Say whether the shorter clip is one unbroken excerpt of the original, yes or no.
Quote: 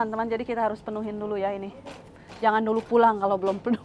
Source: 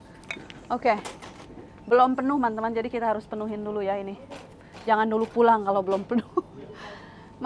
yes